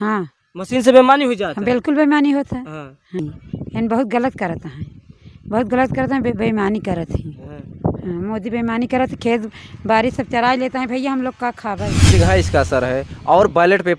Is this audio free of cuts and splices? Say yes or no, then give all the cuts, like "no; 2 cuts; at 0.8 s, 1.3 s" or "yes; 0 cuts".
no; 2 cuts; at 3.2 s, 12.1 s